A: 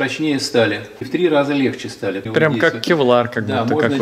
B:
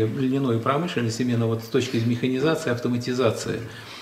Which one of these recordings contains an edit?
A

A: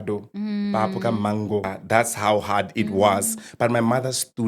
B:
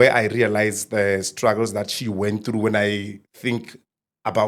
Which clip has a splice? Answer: A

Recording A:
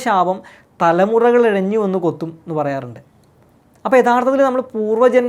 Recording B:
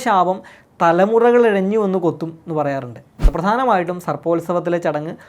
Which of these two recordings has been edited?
B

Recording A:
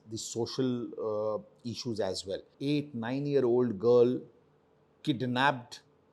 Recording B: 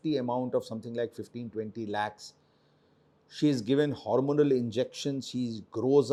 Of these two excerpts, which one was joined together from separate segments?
A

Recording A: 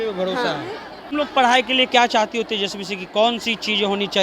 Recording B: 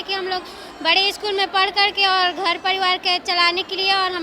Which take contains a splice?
A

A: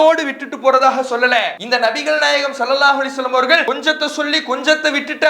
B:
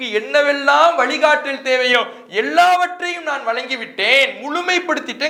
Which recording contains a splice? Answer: A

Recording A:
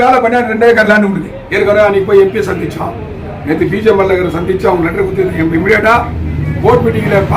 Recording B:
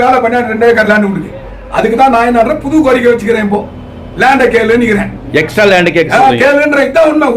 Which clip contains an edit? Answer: B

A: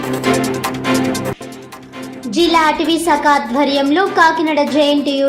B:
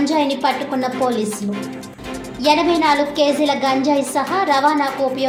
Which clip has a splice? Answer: A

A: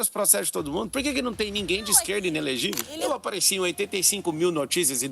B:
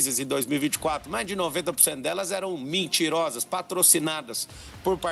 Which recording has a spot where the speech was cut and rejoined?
A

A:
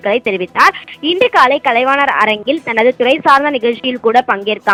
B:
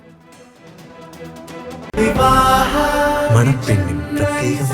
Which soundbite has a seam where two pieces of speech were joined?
B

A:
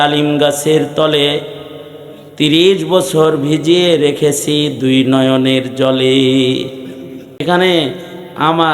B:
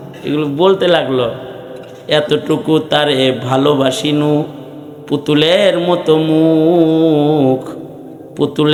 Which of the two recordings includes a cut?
A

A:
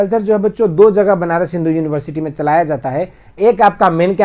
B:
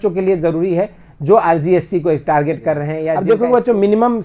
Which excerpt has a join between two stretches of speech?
B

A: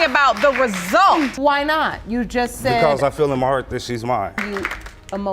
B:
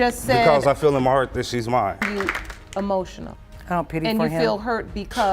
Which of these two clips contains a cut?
A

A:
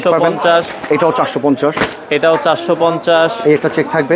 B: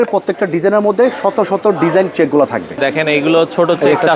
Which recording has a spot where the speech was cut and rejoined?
B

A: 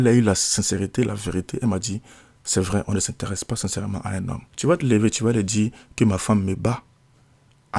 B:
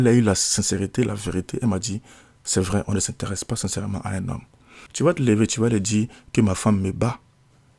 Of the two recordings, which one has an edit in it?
A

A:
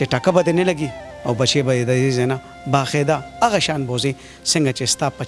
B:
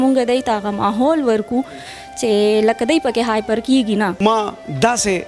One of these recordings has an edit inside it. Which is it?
B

